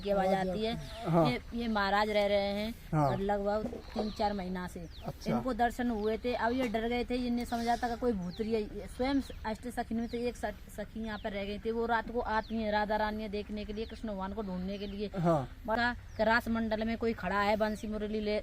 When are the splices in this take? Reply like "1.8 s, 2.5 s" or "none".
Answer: 15.7 s